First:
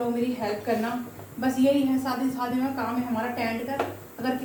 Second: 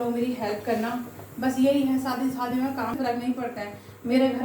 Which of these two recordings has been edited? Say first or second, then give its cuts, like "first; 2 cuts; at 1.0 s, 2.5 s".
second; 1 cut; at 2.9 s